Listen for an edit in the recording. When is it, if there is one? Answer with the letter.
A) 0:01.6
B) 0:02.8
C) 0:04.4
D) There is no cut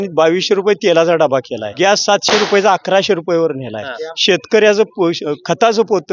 A